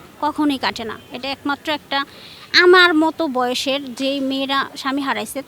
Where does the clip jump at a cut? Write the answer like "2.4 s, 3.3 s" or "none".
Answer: none